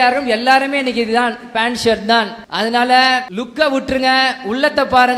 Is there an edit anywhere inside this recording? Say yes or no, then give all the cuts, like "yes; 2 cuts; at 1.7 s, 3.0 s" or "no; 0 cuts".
yes; 2 cuts; at 2.4 s, 3.4 s